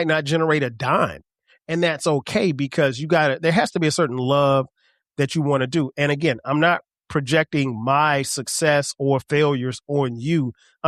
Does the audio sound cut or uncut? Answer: uncut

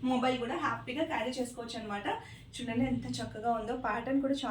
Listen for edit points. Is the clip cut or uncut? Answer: uncut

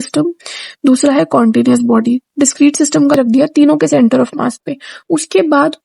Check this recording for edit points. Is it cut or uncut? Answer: cut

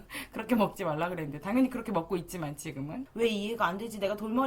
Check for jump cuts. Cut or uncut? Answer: cut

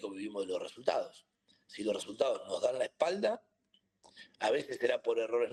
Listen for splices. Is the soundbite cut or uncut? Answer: uncut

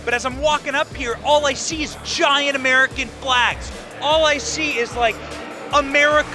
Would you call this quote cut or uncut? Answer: uncut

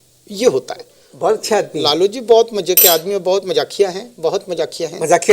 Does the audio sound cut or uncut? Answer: cut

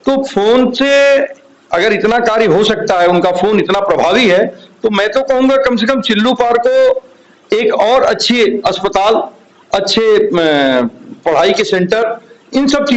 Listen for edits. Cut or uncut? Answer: uncut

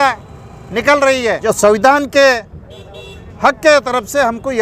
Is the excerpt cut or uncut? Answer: cut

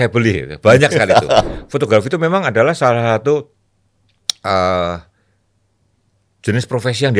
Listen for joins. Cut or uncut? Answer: cut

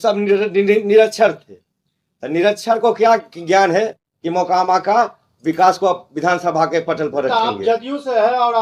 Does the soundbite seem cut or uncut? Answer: uncut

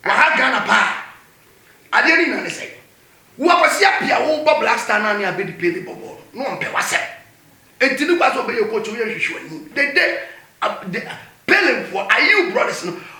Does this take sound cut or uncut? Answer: uncut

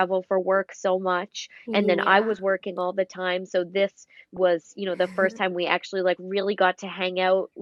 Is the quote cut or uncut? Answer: uncut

